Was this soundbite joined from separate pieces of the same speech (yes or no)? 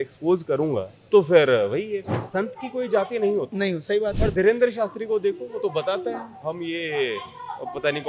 yes